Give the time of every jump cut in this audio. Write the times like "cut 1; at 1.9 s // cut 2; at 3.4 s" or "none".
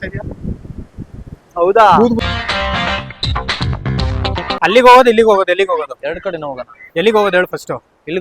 cut 1; at 2.2 s // cut 2; at 4.6 s